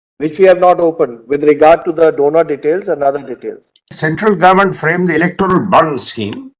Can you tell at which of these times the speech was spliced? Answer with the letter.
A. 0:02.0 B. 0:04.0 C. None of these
B